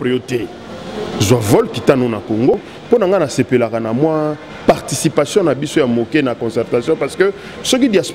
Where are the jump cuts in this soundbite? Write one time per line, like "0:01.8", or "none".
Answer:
0:02.7